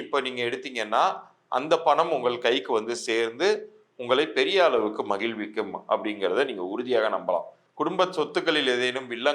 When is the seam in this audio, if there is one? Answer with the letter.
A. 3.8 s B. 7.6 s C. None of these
B